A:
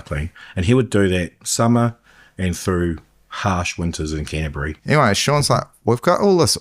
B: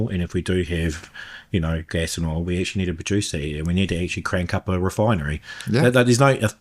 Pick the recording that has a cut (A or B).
A